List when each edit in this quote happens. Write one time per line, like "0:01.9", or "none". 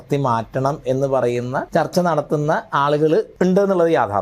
0:01.6
0:03.3